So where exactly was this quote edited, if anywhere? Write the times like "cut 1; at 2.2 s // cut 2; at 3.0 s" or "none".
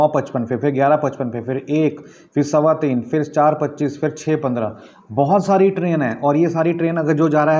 none